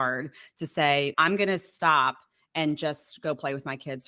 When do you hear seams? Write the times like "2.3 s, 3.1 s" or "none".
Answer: 1.1 s